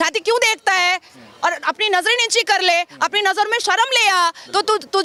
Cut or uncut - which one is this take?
uncut